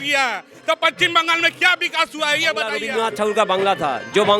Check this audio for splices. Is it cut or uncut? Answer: cut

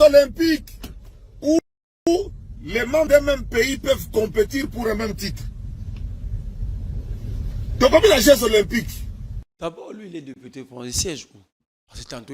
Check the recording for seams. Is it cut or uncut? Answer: cut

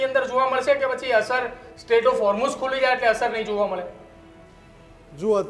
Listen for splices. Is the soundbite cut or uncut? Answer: uncut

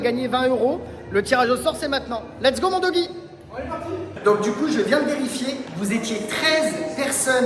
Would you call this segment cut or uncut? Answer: uncut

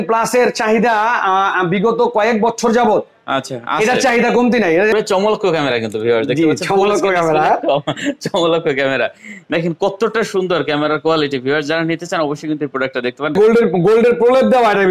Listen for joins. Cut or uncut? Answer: cut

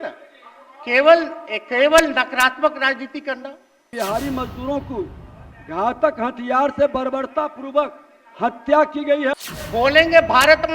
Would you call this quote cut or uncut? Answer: cut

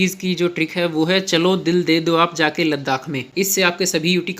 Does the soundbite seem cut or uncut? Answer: cut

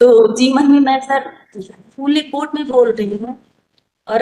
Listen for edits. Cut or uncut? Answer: uncut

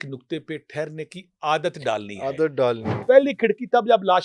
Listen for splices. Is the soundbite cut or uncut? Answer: cut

